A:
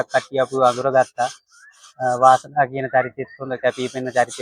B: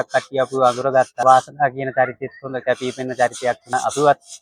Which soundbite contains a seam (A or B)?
B